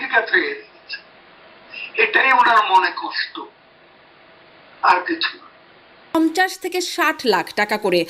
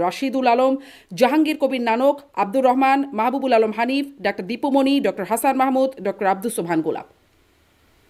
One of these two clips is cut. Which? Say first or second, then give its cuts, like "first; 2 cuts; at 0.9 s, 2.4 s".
first; 1 cut; at 6.1 s